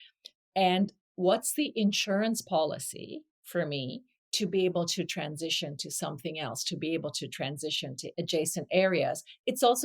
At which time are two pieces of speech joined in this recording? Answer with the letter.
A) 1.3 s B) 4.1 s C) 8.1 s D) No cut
C